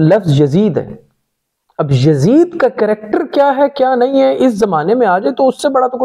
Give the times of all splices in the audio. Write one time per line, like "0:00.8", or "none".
none